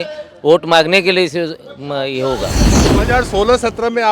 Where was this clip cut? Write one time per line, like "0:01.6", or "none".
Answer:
0:02.8

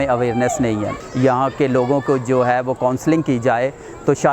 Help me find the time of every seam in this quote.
0:01.0

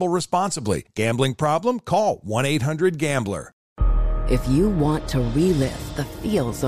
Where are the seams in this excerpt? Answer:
0:03.7

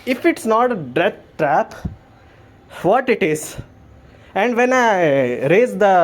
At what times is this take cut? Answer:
none

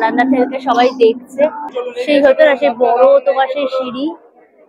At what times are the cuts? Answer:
none

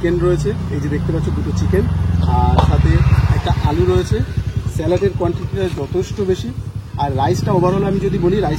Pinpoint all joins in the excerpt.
none

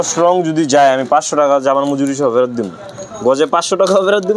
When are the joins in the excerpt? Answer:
none

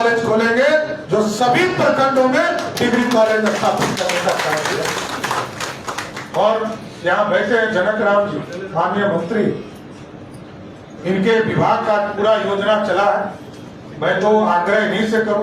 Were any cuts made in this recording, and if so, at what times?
none

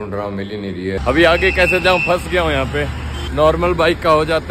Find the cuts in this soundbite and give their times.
0:01.0
0:03.2

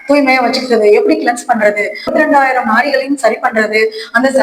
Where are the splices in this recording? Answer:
0:02.1

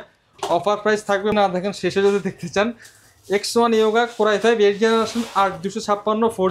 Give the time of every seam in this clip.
0:01.3

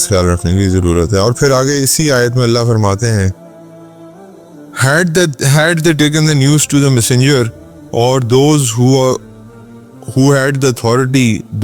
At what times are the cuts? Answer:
none

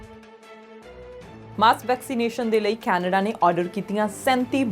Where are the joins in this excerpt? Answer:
0:01.4

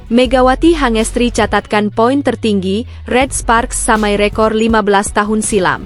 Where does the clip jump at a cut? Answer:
none

